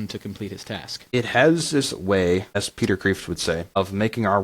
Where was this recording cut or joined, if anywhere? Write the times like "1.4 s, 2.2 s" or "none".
1.1 s, 2.7 s, 3.8 s